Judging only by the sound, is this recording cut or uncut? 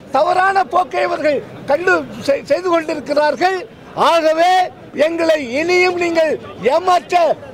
uncut